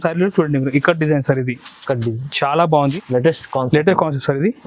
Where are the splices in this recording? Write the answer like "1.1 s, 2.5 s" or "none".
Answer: 3.0 s